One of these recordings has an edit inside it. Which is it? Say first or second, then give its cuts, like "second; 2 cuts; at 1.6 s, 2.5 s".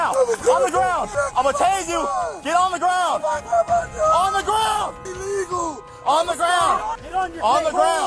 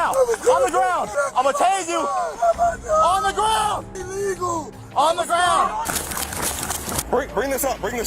second; 2 cuts; at 2.3 s, 5.9 s